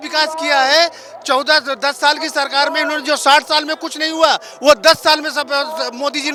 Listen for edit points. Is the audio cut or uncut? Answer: uncut